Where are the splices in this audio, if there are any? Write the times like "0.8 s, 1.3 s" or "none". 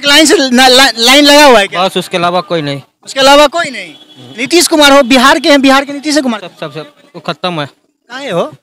none